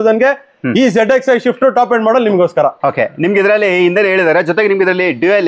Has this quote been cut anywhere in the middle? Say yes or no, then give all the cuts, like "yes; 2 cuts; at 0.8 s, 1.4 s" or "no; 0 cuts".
no; 0 cuts